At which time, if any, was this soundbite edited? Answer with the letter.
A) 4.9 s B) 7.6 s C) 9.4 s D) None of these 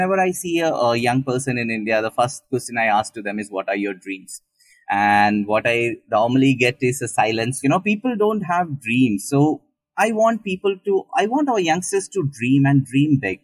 B